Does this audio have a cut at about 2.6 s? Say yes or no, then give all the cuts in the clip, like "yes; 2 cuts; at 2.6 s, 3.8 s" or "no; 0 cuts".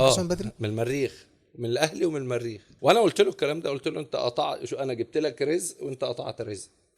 yes; 1 cut; at 2.6 s